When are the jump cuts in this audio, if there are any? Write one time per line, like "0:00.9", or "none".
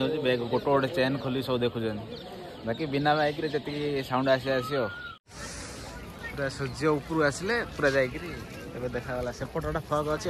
0:05.2